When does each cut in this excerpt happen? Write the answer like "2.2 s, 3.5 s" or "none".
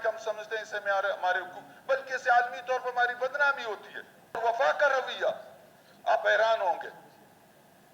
4.4 s